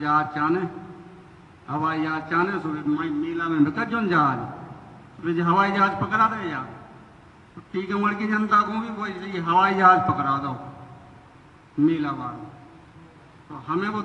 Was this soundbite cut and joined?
no; 0 cuts

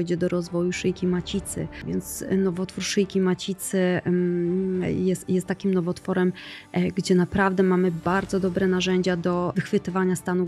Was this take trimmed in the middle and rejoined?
yes; 2 cuts; at 1.8 s, 9.5 s

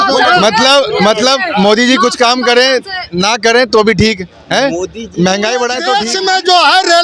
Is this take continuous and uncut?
no; 1 cut; at 5.9 s

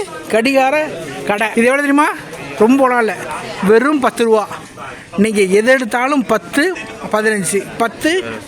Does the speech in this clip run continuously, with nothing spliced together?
no; 1 cut; at 1.5 s

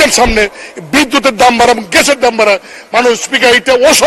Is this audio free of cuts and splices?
yes; 0 cuts

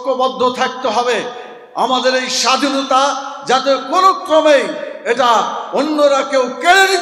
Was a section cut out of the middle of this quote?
no; 0 cuts

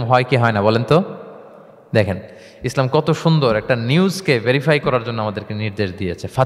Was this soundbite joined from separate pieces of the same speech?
no; 0 cuts

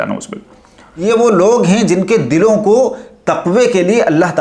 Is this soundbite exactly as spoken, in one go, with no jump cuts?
no; 1 cut; at 1.0 s

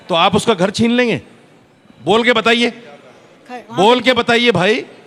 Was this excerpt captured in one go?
yes; 0 cuts

